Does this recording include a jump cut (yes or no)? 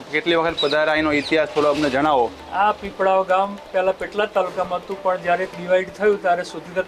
no